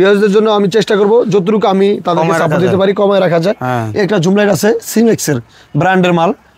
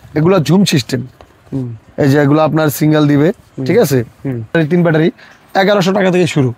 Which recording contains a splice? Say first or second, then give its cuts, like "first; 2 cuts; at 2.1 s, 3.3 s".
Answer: second; 1 cut; at 4.5 s